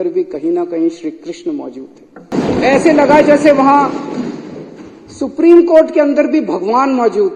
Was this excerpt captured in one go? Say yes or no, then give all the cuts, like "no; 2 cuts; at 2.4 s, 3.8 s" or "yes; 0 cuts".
no; 1 cut; at 2.3 s